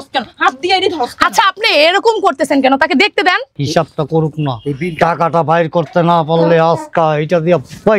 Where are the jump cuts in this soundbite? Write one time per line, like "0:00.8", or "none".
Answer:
0:03.5